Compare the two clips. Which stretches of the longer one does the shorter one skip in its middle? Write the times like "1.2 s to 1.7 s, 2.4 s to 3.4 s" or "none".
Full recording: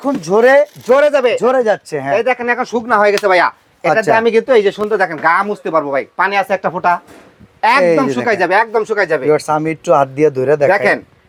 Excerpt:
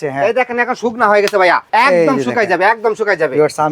3.5 s to 7.5 s